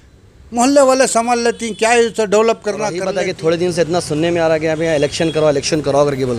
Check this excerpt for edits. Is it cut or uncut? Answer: cut